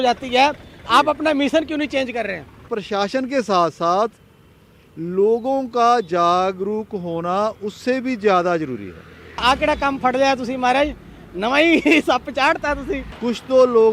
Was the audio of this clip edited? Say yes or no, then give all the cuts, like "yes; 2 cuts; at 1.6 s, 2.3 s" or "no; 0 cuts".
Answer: yes; 3 cuts; at 2.6 s, 9.4 s, 13.1 s